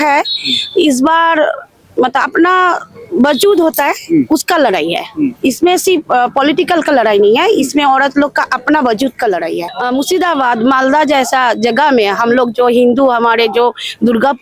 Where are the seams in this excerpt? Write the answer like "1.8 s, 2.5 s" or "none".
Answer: 9.6 s